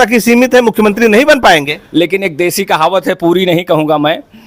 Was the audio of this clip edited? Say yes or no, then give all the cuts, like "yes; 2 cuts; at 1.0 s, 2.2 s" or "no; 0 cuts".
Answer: yes; 1 cut; at 1.8 s